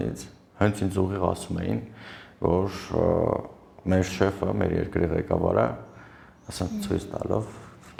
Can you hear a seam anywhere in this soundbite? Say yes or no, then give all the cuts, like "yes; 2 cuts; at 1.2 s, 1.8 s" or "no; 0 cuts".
no; 0 cuts